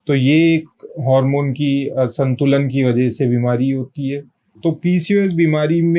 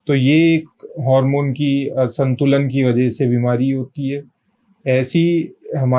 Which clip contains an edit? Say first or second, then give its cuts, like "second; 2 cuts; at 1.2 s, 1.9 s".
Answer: first; 1 cut; at 4.5 s